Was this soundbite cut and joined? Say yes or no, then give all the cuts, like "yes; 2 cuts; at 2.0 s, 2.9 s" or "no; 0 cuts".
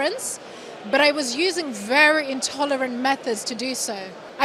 no; 0 cuts